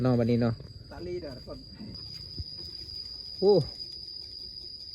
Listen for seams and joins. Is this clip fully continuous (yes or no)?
no